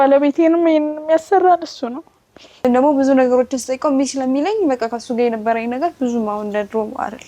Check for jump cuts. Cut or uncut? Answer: cut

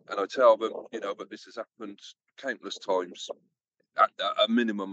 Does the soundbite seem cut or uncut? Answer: uncut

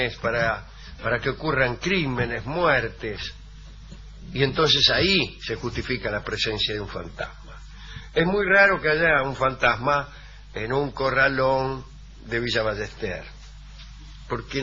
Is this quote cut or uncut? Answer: cut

